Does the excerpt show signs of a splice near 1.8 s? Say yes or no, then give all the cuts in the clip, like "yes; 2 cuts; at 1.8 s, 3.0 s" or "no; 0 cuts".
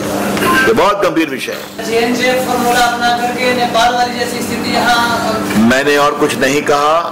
yes; 1 cut; at 1.8 s